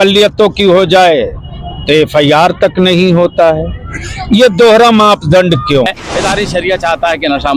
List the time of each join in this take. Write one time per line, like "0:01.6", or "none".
0:05.9